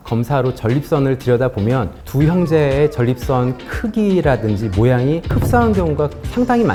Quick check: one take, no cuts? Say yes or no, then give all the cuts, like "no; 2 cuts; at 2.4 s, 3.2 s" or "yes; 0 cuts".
yes; 0 cuts